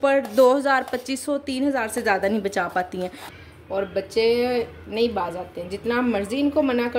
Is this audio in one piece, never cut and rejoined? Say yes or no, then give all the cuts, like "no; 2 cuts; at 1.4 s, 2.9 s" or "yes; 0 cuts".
no; 1 cut; at 3.3 s